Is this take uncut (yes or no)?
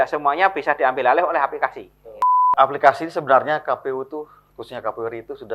no